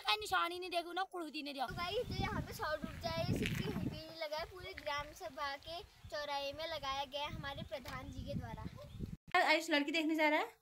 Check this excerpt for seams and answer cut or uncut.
cut